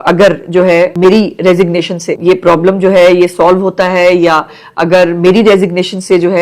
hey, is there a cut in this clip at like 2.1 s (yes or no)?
yes